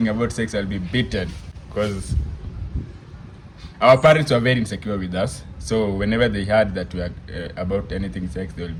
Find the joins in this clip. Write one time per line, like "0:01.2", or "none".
none